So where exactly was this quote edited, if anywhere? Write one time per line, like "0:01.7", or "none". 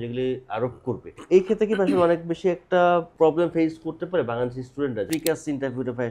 0:01.1
0:03.1
0:05.1